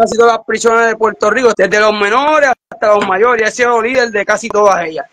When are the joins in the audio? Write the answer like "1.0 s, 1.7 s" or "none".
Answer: 1.5 s